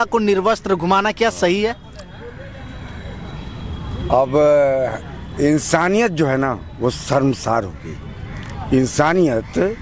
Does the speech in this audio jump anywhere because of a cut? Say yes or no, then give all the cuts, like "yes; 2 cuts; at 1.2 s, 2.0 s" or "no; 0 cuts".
no; 0 cuts